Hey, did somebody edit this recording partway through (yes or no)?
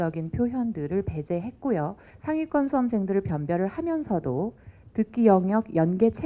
yes